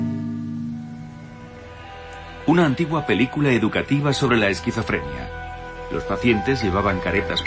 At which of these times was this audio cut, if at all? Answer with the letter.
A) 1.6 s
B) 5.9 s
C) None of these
C